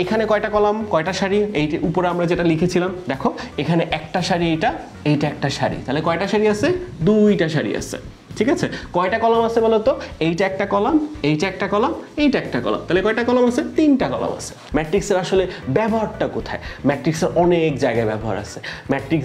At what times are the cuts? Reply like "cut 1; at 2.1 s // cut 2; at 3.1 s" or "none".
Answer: cut 1; at 14.6 s